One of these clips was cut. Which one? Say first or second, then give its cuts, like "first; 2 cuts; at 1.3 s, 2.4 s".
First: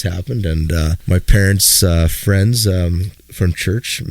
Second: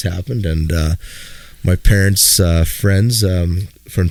first; 1 cut; at 1.0 s